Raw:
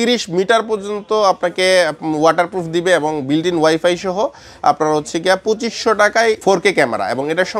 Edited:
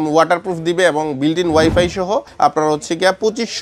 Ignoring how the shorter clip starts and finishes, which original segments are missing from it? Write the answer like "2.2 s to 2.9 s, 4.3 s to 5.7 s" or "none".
4.4 s to 4.5 s